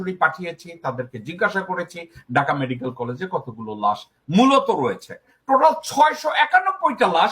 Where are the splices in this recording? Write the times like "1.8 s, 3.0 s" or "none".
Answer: 5.4 s